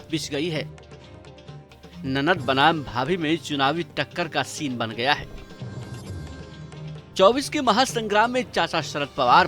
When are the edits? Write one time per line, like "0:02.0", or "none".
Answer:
0:05.3
0:07.1